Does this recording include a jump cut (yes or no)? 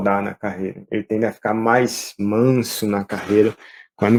no